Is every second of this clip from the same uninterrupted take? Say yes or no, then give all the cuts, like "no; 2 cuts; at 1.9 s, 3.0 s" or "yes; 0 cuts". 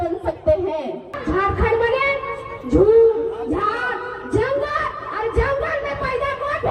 no; 1 cut; at 1.1 s